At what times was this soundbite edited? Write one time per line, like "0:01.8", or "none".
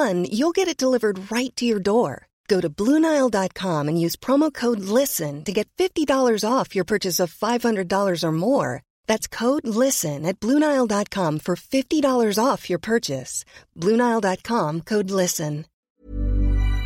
0:15.9